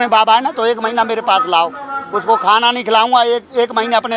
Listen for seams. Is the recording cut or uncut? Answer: uncut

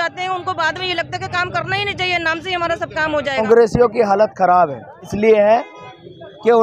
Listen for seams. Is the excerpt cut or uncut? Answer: cut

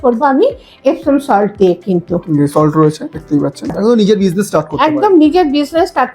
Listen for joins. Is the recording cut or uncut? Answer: cut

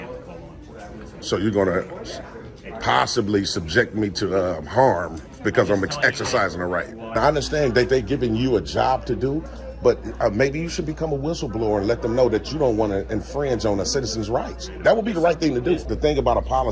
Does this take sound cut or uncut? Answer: cut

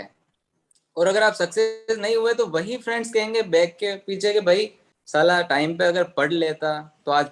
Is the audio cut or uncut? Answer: uncut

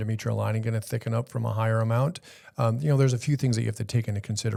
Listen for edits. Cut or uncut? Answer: uncut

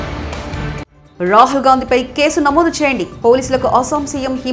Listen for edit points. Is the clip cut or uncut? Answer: cut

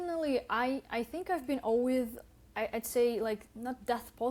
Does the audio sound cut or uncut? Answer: uncut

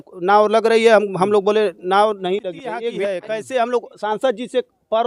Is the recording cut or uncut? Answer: cut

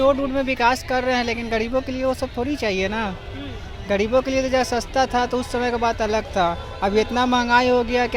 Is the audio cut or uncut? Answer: uncut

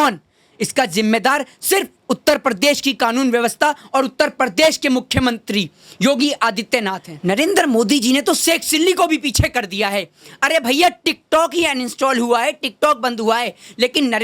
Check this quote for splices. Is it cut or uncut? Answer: cut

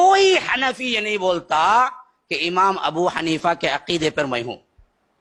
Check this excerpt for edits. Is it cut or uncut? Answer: uncut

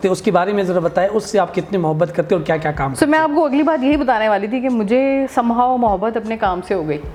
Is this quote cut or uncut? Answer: uncut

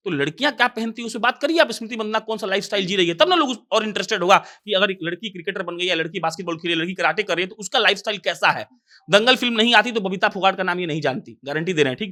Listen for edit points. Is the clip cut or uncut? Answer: uncut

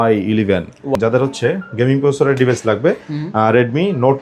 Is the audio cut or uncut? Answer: cut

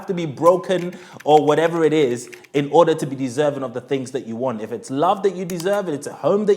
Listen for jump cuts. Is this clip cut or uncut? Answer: uncut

